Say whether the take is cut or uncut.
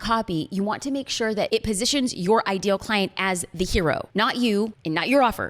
cut